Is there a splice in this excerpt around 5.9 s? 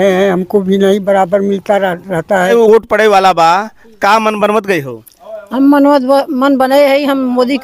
no; 1 cut; at 2.5 s

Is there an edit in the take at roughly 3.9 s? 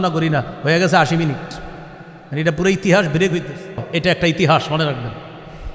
yes; 1 cut; at 3.9 s

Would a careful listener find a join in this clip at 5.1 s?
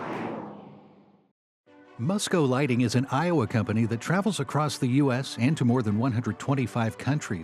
no; 1 cut; at 0.9 s

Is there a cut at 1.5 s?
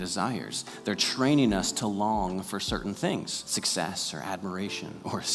no; 1 cut; at 3.4 s

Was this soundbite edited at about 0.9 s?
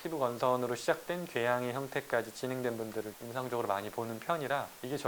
no; 1 cut; at 3.2 s

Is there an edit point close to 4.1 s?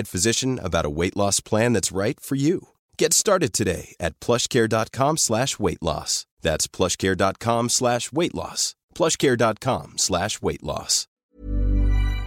no; 1 cut; at 11.1 s

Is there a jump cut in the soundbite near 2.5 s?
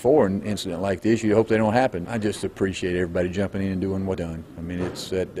no; 1 cut; at 4.2 s

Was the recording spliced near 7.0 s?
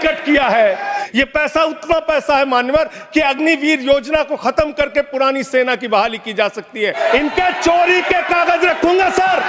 yes; 2 cuts; at 1.0 s, 7.0 s

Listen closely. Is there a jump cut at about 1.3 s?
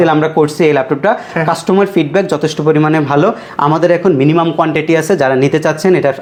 no; 0 cuts

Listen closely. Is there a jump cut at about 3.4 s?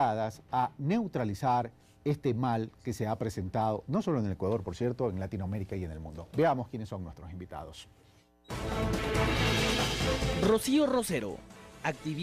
yes; 1 cut; at 3.4 s

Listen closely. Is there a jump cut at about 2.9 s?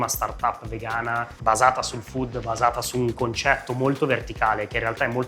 no; 1 cut; at 1.3 s

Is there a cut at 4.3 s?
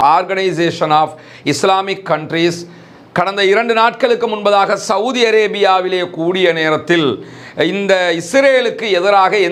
no; 0 cuts

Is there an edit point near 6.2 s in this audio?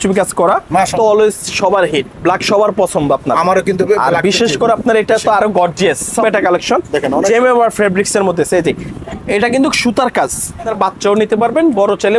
yes; 3 cuts; at 0.9 s, 6.2 s, 10.7 s

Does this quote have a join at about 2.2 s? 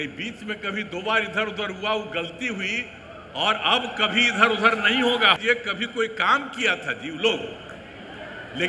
no; 1 cut; at 5.4 s

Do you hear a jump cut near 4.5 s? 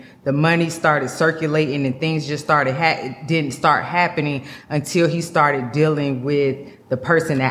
no; 0 cuts

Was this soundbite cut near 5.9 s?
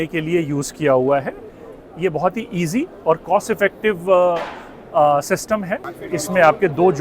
yes; 1 cut; at 5.9 s

